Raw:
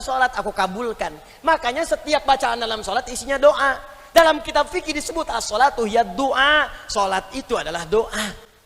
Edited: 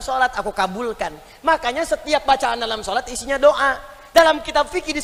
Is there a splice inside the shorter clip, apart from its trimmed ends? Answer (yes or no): no